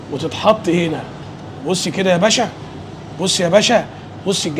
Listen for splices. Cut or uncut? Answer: uncut